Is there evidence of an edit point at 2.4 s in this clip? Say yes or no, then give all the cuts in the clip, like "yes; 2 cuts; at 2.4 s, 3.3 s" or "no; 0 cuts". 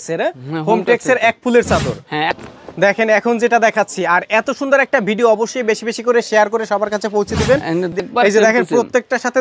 yes; 2 cuts; at 2.4 s, 7.9 s